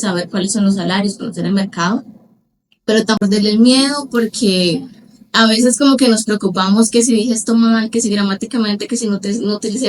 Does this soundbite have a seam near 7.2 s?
no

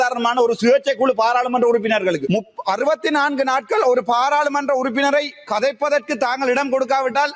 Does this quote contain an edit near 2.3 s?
yes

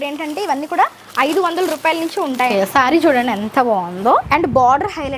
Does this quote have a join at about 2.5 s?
yes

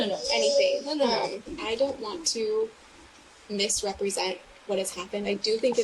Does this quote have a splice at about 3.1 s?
no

